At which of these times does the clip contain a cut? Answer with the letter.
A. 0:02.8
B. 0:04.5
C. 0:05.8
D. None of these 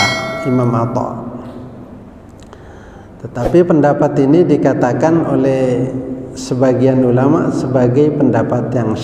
D